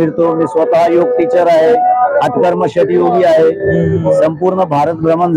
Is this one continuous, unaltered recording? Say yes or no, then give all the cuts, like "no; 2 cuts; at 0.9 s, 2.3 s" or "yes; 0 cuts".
yes; 0 cuts